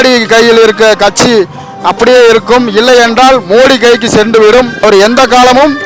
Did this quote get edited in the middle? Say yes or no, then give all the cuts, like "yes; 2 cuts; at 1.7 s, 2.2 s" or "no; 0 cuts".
yes; 1 cut; at 4.8 s